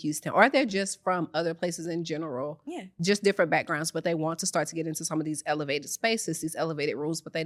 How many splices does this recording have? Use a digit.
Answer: 0